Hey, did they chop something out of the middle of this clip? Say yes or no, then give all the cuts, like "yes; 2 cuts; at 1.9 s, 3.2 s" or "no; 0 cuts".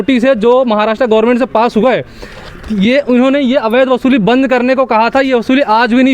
no; 0 cuts